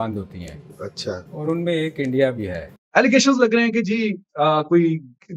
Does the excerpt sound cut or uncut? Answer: cut